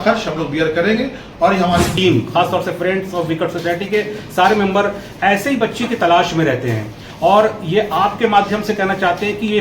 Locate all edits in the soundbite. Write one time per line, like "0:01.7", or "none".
0:01.9